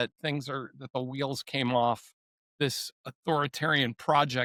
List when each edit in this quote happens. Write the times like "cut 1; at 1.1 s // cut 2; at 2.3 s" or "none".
none